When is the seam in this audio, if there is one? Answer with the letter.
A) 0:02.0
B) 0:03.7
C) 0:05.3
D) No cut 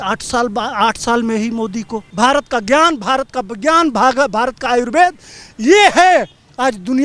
A